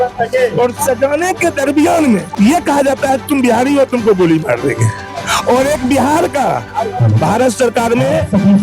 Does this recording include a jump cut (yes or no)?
yes